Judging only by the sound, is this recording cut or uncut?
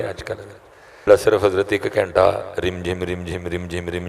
cut